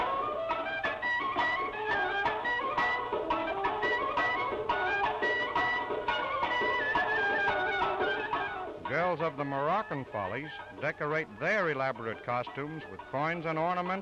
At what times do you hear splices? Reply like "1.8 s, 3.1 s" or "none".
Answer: none